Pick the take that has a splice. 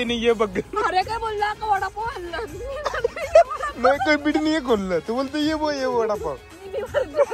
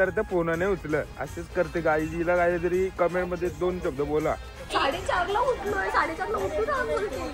second; 2 cuts; at 1.1 s, 4.6 s

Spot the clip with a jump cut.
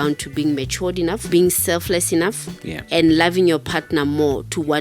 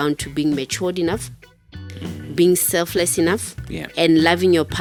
first; 1 cut; at 1.2 s

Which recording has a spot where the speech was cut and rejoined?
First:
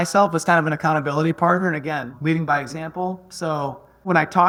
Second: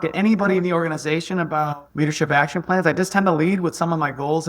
second; 1 cut; at 1.8 s

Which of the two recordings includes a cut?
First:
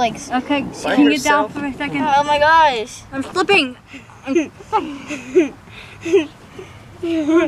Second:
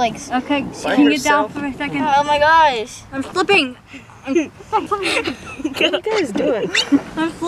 second; 1 cut; at 4.9 s

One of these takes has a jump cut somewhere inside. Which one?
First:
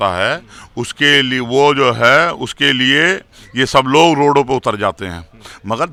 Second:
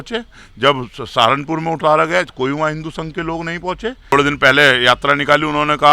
second; 1 cut; at 4.1 s

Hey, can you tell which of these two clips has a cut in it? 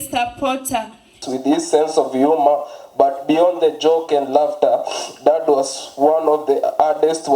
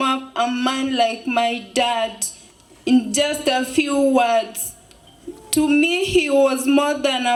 first; 1 cut; at 1.2 s

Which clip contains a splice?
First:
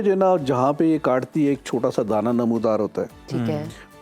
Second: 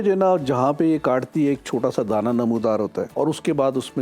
second; 1 cut; at 3.1 s

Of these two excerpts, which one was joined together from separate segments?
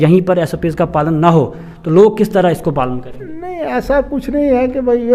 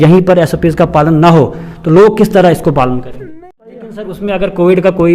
second; 1 cut; at 3.8 s

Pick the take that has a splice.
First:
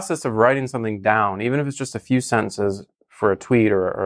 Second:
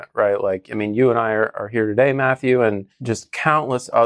second; 1 cut; at 2.9 s

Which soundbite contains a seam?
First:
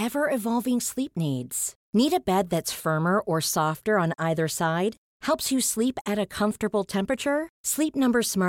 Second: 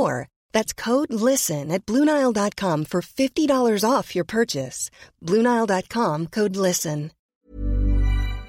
second; 1 cut; at 7.2 s

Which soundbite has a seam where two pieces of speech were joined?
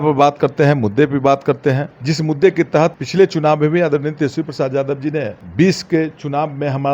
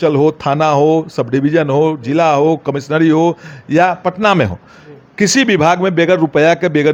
first; 3 cuts; at 1.9 s, 3.0 s, 5.4 s

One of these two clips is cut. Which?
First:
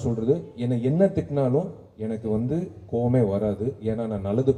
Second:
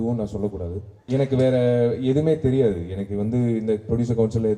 second; 1 cut; at 0.9 s

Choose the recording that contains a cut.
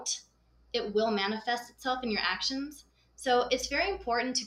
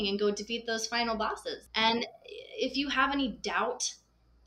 second; 1 cut; at 1.7 s

